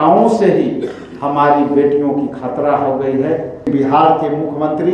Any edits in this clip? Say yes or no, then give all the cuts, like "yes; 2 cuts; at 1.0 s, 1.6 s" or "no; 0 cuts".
yes; 1 cut; at 3.7 s